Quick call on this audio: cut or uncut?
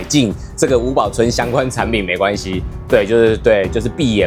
uncut